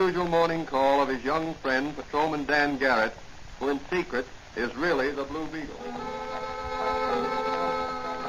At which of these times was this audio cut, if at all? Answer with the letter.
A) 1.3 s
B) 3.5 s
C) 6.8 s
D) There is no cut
B